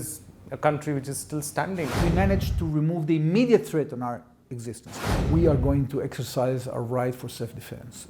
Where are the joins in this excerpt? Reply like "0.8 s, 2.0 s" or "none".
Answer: 2.0 s, 4.9 s